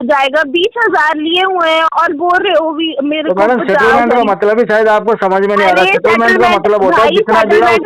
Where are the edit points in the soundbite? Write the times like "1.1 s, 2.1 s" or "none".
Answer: none